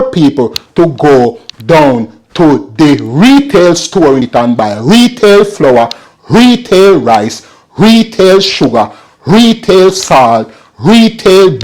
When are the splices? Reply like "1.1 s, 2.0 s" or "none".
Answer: 4.2 s